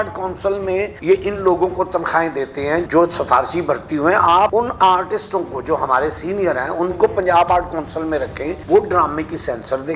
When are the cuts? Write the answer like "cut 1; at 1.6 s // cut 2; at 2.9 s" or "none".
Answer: cut 1; at 0.9 s // cut 2; at 2.9 s // cut 3; at 4.5 s // cut 4; at 8.5 s